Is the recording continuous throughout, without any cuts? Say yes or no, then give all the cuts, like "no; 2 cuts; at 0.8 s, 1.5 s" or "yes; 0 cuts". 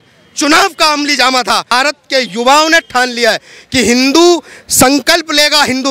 no; 1 cut; at 1.7 s